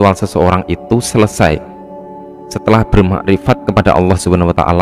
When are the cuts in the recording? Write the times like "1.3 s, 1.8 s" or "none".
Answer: none